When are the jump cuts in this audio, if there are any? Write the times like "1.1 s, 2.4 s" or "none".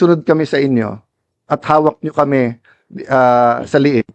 none